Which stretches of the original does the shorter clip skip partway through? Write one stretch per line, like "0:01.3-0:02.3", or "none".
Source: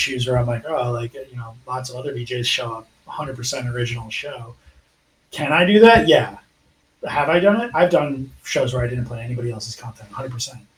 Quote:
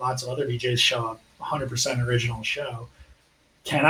none